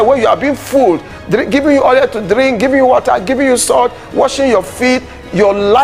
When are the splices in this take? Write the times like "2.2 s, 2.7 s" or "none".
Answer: none

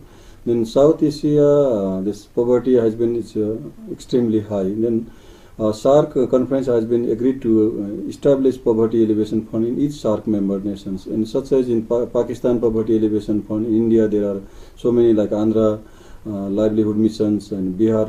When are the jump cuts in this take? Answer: 4.0 s

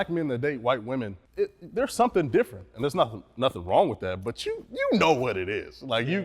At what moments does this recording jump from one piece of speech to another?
1.2 s

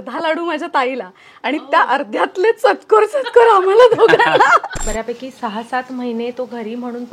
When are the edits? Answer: 4.8 s

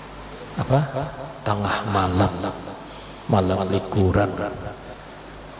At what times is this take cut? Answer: none

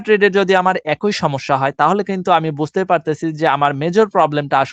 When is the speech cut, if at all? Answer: none

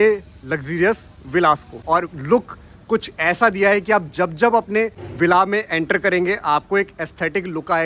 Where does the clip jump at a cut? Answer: 1.8 s, 5.0 s

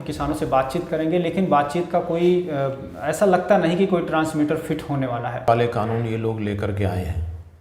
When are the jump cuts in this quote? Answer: 5.5 s

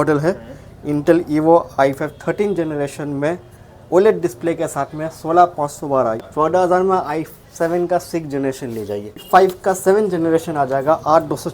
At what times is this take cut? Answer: 6.2 s, 9.2 s

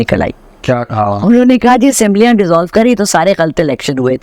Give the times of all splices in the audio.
none

